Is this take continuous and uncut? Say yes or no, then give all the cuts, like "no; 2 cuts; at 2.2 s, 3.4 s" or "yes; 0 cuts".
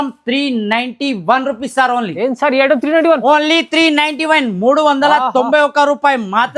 yes; 0 cuts